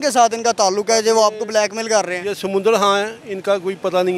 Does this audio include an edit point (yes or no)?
no